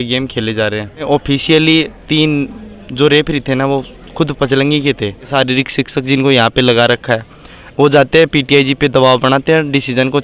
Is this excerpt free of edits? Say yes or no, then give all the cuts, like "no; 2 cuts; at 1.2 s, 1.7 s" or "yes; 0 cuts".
no; 2 cuts; at 1.1 s, 5.3 s